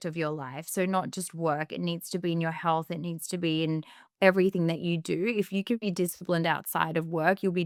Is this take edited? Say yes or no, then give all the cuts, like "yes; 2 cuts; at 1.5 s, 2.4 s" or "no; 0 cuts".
no; 0 cuts